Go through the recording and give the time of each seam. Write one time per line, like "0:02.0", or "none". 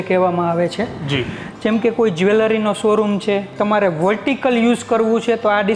0:03.5